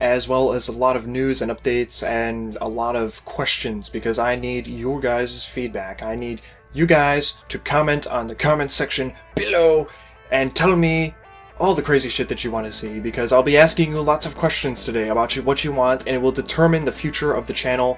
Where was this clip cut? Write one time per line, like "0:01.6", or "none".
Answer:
0:16.0